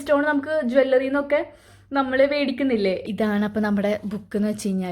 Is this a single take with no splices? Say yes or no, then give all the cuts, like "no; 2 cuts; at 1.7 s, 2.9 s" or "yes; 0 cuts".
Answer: no; 1 cut; at 3.0 s